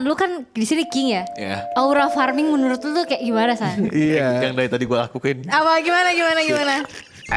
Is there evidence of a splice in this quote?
no; 0 cuts

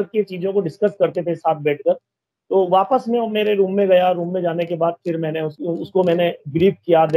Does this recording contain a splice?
yes; 1 cut; at 5.5 s

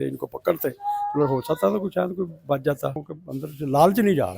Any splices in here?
yes; 1 cut; at 3.0 s

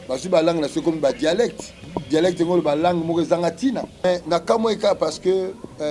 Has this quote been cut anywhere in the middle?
yes; 1 cut; at 4.0 s

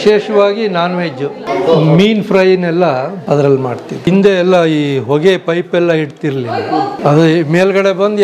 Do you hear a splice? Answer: yes; 4 cuts; at 1.4 s, 3.2 s, 4.1 s, 6.9 s

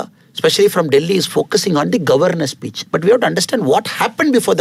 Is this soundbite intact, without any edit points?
yes; 0 cuts

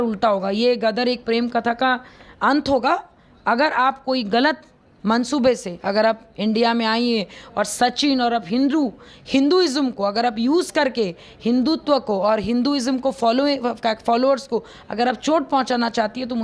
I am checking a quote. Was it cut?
no; 0 cuts

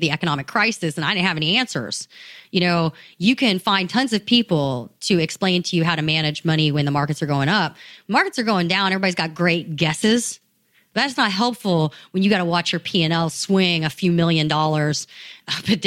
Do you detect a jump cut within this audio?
no; 0 cuts

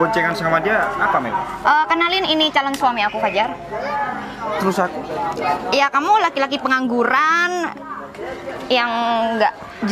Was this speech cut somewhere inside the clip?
no; 0 cuts

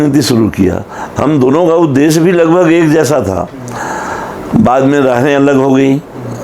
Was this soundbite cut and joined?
no; 0 cuts

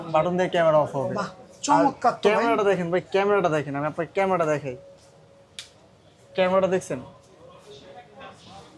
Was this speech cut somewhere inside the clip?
no; 0 cuts

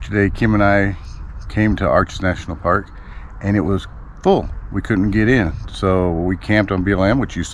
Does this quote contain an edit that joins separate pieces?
no; 0 cuts

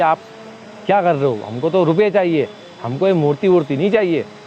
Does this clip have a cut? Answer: no; 0 cuts

